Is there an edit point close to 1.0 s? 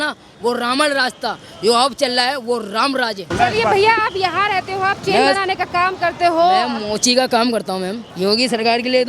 no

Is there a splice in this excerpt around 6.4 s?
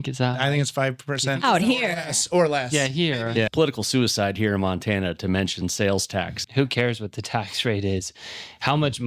yes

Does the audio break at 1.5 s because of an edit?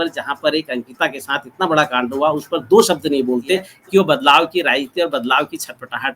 no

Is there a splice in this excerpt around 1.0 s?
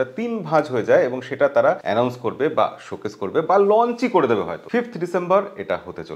no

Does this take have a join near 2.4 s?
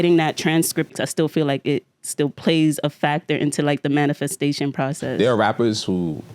no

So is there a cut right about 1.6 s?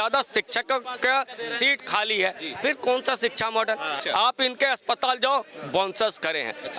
no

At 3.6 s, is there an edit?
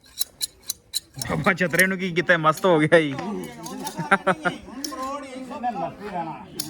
no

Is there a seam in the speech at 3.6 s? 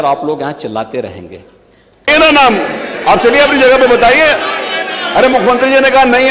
no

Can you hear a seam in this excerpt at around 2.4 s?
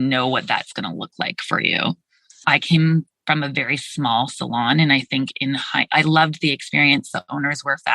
yes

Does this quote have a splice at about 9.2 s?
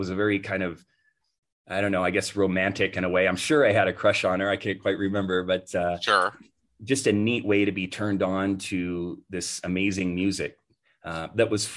no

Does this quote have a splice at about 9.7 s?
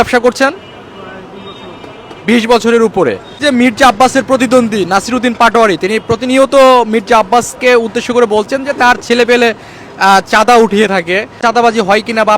no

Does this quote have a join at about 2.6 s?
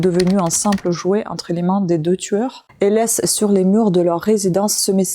yes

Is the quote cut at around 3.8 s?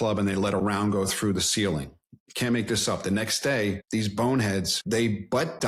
yes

